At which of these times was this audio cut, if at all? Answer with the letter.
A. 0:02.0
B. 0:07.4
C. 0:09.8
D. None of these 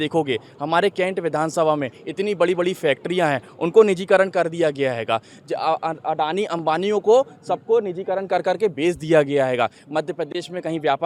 C